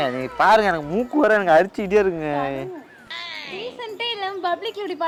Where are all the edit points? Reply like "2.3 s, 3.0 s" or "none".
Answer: none